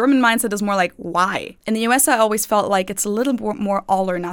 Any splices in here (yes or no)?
yes